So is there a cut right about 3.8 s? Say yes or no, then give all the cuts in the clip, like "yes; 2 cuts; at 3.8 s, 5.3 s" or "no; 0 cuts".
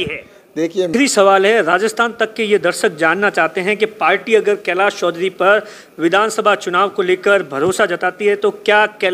no; 1 cut; at 0.9 s